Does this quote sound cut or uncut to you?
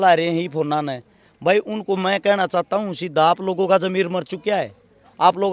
uncut